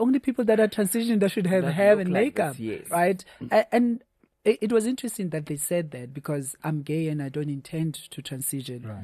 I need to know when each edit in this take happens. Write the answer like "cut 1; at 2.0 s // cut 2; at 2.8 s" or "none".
none